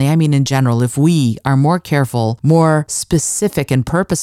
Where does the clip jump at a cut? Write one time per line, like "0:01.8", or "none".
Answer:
0:02.4
0:03.0

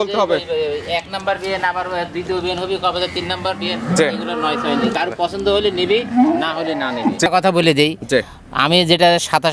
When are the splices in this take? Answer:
0:07.3

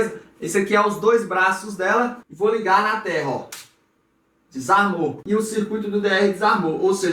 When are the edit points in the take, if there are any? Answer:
0:02.2

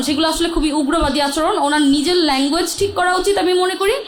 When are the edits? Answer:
none

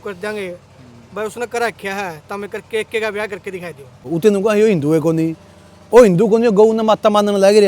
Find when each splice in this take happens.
0:04.1

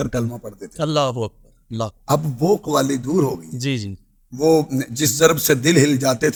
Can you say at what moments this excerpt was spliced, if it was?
none

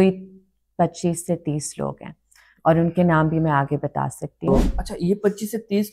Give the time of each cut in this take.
0:04.6

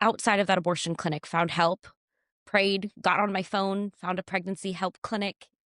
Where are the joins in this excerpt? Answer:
none

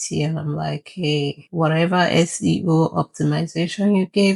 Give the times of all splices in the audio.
none

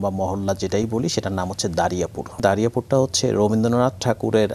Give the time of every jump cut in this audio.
0:02.4

